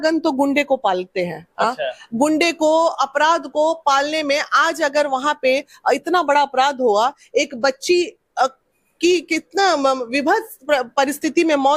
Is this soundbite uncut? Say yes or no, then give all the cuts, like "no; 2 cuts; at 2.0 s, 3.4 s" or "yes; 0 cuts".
yes; 0 cuts